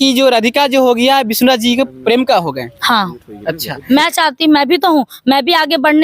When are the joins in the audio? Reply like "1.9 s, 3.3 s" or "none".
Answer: 3.7 s